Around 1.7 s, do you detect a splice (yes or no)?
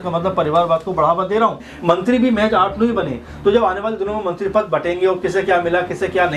yes